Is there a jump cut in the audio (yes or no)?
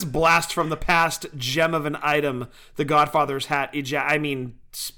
no